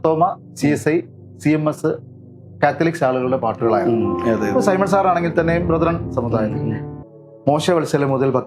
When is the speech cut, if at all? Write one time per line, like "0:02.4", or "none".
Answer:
0:06.9